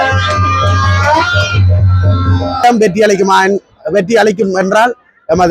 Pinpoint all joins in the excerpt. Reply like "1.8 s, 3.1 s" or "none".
2.6 s